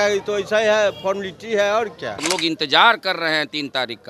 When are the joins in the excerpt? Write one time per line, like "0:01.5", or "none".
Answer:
0:02.2